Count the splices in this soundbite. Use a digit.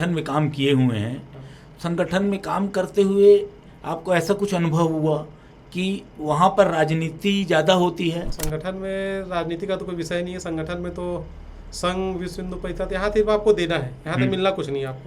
1